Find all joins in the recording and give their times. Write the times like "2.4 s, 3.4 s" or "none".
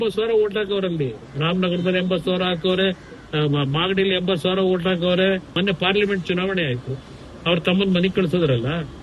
5.5 s